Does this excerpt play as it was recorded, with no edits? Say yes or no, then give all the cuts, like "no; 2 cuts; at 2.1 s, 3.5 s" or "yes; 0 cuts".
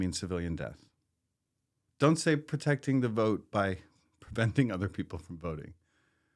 no; 1 cut; at 1.8 s